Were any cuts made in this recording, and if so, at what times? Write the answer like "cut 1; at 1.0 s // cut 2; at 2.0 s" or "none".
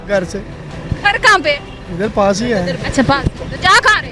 none

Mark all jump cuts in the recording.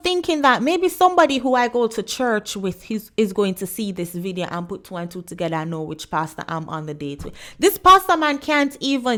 none

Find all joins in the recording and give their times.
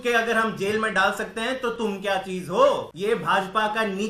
cut 1; at 2.9 s

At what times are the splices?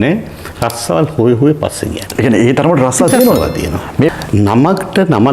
cut 1; at 4.1 s

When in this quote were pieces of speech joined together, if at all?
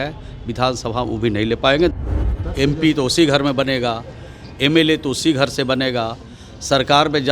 cut 1; at 1.9 s

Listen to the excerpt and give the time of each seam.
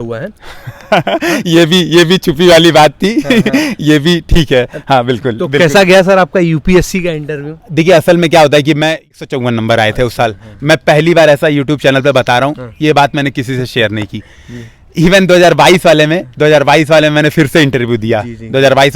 cut 1; at 9.1 s

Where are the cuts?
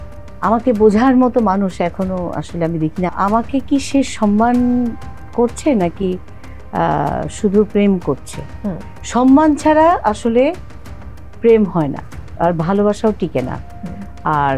cut 1; at 3.1 s

